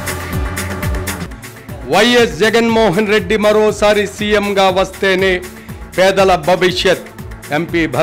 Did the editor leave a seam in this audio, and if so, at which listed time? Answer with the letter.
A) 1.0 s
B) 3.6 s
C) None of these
A